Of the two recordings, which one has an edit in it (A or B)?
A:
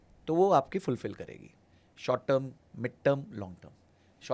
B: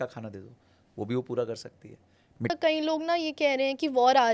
B